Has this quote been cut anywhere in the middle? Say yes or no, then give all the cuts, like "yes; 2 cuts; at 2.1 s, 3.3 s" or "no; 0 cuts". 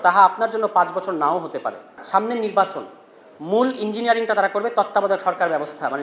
yes; 1 cut; at 2.0 s